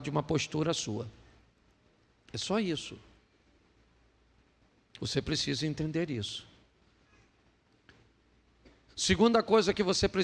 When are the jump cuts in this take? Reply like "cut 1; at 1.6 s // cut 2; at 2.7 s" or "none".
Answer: none